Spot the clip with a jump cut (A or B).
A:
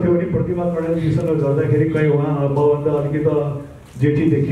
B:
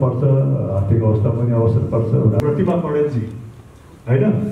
B